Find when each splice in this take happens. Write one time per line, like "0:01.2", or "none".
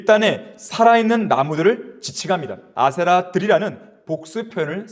0:02.6